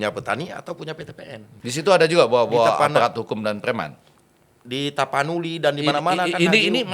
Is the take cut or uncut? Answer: cut